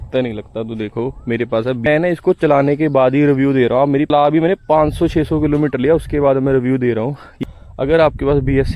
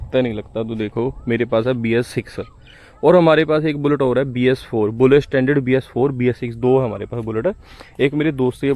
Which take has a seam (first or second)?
first